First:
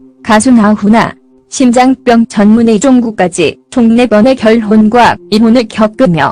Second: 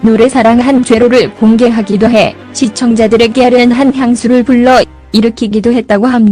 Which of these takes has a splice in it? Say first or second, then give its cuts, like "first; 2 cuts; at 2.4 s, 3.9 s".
second; 1 cut; at 5.2 s